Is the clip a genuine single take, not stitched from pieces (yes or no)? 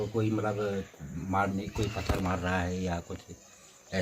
yes